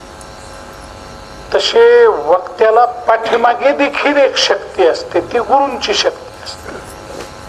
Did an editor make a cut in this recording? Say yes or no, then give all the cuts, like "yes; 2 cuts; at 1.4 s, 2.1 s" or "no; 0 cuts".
no; 0 cuts